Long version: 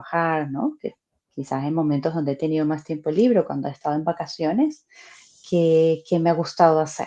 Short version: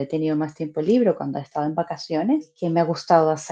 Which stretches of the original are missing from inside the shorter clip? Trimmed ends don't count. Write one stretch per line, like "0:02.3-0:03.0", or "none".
0:04.9-0:06.1